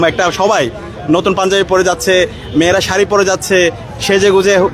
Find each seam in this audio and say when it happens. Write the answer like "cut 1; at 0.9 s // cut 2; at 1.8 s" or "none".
none